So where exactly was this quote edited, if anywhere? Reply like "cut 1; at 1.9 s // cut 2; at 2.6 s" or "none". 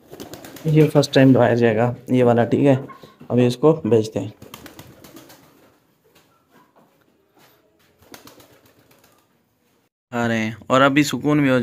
cut 1; at 9.9 s